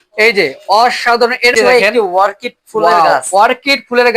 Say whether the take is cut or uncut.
cut